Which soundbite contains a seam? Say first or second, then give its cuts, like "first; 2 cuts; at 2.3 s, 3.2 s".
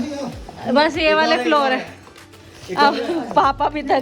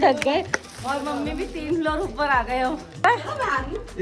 second; 1 cut; at 2.9 s